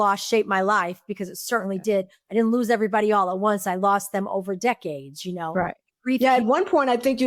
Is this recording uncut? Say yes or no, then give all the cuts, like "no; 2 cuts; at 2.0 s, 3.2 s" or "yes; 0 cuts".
yes; 0 cuts